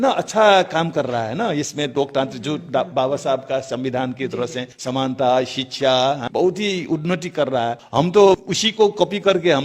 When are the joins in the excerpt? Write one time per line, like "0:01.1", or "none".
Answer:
0:04.7
0:06.2
0:07.8
0:08.6